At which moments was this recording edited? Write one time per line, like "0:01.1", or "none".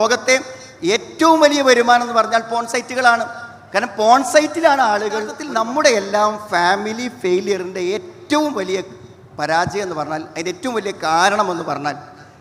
0:05.4